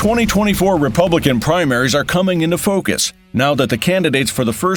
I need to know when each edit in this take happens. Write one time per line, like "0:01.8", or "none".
none